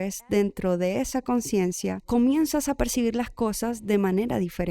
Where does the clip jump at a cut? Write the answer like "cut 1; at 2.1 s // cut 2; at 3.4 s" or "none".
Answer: cut 1; at 2.0 s